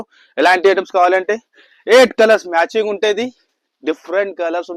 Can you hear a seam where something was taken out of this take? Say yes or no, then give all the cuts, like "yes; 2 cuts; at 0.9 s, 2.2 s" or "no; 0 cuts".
no; 0 cuts